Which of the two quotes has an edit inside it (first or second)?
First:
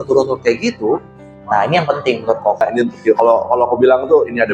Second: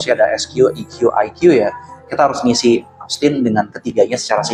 first